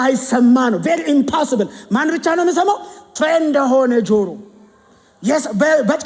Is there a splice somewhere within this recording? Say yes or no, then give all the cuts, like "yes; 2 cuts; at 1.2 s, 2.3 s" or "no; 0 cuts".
no; 0 cuts